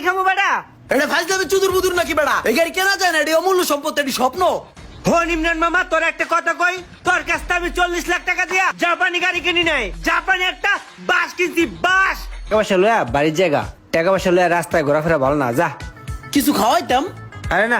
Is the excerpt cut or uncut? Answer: cut